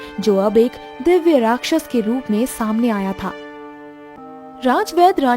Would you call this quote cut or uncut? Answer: cut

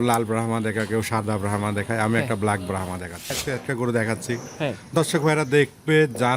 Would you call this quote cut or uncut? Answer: cut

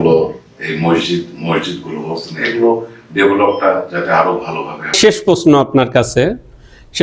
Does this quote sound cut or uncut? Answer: uncut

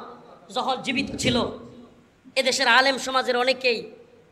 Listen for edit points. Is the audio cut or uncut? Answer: uncut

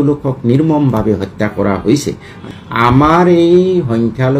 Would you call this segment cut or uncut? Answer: cut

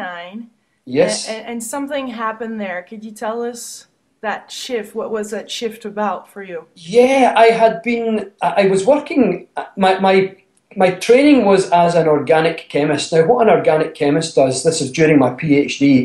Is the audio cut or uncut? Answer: cut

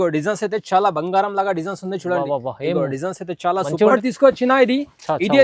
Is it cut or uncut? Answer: cut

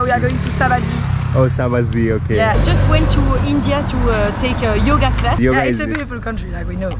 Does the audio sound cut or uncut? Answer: cut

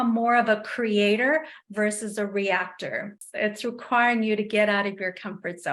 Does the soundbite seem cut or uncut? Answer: cut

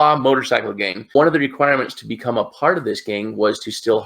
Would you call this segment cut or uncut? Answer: cut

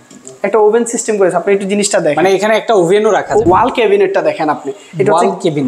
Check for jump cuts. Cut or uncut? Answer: cut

